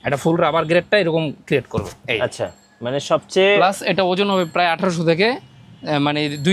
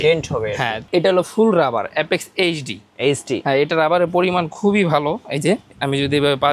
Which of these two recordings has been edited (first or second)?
second